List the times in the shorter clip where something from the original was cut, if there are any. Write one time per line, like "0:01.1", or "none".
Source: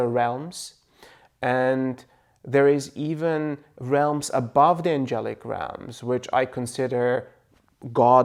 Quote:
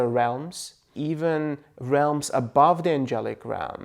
0:00.9